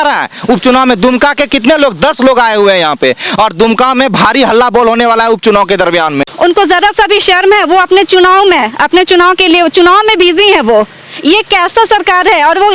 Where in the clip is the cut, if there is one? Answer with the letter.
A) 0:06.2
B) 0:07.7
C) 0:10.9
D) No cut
A